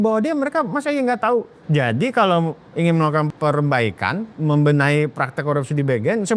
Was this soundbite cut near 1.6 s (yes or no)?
yes